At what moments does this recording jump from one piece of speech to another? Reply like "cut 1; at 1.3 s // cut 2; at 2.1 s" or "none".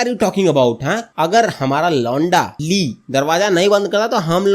cut 1; at 1.1 s // cut 2; at 2.6 s